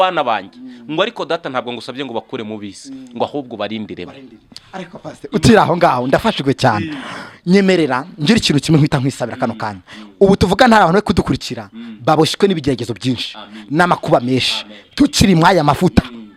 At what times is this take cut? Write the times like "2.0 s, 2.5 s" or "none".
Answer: none